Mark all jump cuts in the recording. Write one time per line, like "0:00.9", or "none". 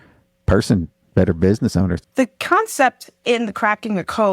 0:02.0